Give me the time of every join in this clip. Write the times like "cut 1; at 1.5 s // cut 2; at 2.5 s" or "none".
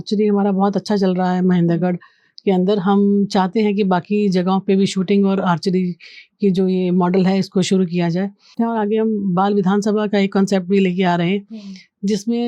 cut 1; at 8.5 s